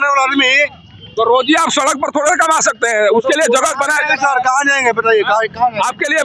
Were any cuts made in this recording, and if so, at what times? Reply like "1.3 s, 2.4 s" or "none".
none